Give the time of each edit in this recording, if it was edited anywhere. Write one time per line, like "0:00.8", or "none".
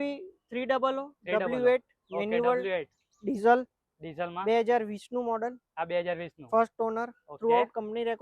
none